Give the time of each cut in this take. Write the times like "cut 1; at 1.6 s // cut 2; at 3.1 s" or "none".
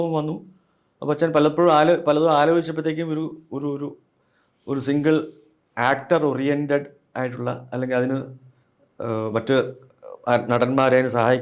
none